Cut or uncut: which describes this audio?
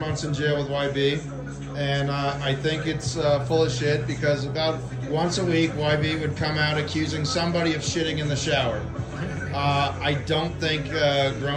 uncut